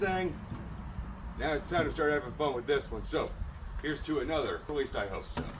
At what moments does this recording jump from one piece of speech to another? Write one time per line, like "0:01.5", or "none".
0:04.7